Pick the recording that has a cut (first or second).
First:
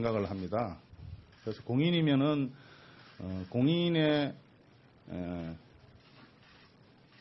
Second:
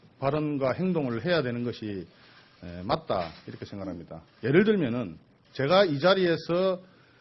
first